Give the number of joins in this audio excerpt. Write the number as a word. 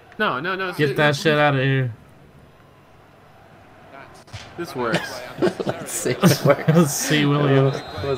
zero